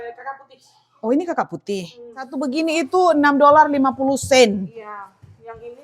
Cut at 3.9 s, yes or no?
no